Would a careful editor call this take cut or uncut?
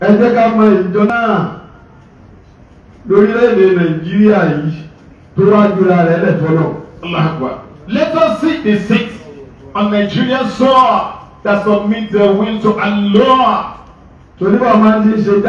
cut